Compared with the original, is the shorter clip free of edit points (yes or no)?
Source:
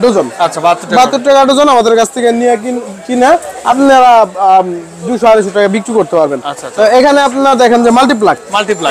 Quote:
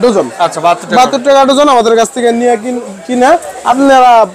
yes